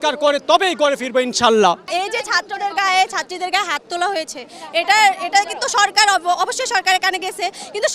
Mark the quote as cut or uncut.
uncut